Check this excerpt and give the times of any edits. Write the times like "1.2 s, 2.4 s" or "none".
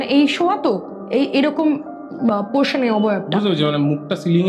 none